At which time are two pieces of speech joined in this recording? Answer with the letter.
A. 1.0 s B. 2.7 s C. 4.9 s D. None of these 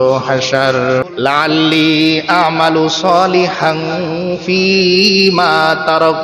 A